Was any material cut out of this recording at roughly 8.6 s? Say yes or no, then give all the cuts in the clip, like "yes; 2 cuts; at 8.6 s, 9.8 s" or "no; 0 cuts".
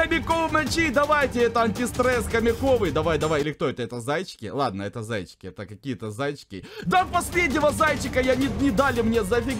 no; 0 cuts